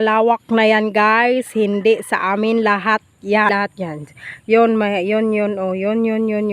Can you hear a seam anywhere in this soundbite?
yes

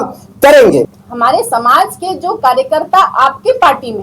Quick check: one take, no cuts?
no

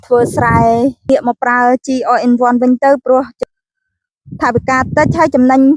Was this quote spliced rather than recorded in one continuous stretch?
yes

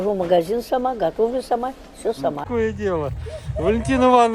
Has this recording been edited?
yes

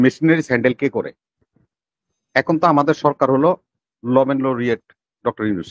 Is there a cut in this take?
no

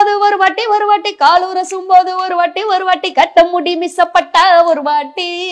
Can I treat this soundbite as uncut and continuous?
yes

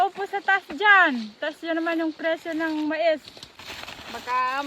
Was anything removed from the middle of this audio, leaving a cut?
yes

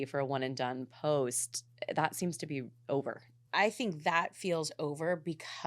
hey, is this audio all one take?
no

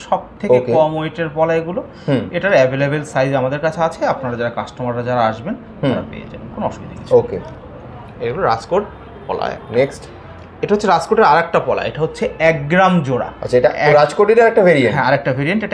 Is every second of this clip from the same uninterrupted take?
yes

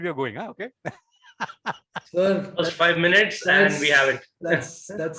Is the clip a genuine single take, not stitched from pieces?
yes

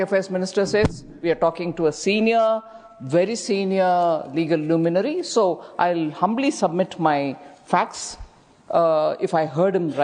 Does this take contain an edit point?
no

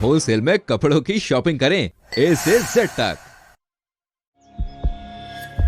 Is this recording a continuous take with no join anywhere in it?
yes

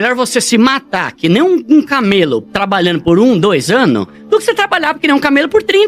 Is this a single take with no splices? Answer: yes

